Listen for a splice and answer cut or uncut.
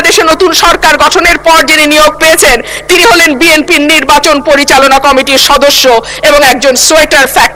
uncut